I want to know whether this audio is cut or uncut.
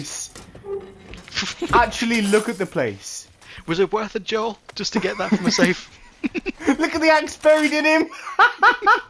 uncut